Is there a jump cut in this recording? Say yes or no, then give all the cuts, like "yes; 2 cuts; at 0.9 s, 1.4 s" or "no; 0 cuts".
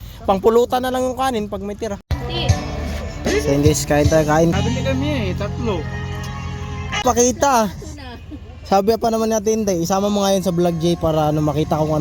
yes; 3 cuts; at 2.1 s, 4.5 s, 7.0 s